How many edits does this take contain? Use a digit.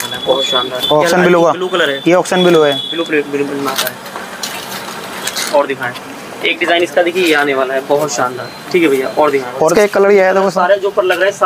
1